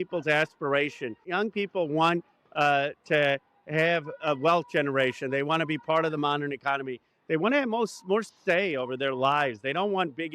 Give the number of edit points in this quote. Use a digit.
1